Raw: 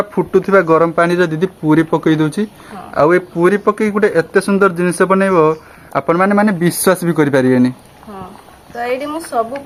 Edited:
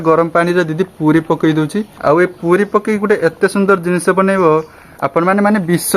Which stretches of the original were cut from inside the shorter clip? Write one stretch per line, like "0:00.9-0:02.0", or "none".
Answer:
0:02.5-0:02.8